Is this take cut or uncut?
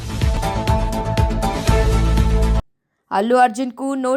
cut